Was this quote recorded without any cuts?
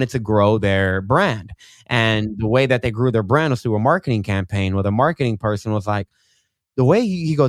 yes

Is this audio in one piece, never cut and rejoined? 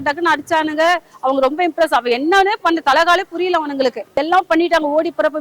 no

